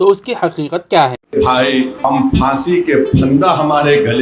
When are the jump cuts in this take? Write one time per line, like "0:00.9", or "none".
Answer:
0:01.1